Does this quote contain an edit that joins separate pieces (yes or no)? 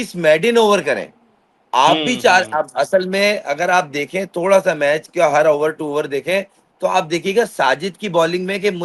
no